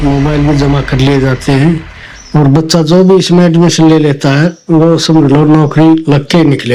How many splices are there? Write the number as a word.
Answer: zero